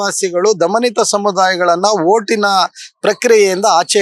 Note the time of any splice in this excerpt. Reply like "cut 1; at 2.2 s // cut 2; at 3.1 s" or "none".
none